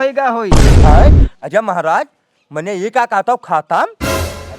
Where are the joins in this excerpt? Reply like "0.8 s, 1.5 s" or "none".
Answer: none